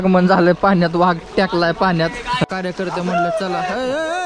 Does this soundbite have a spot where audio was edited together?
yes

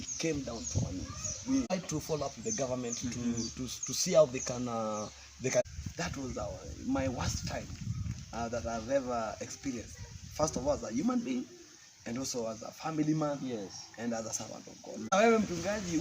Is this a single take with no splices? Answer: no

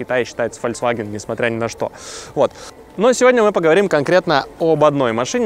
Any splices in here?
no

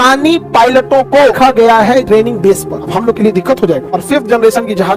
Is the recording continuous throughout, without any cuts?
yes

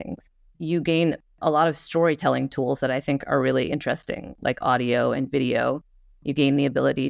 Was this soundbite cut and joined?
no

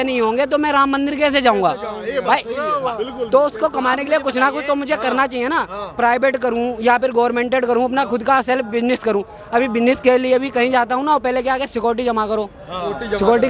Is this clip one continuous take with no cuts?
yes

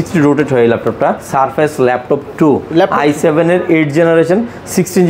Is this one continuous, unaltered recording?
no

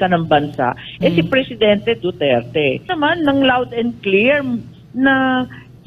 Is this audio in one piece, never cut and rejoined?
no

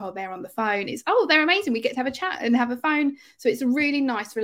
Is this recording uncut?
yes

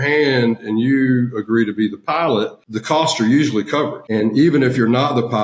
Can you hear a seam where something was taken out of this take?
yes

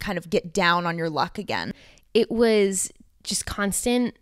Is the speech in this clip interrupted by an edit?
yes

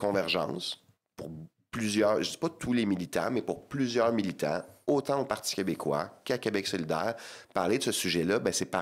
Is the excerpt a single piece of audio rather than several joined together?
yes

